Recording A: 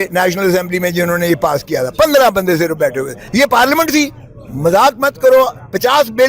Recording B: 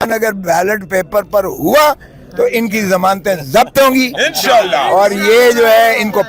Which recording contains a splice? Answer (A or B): A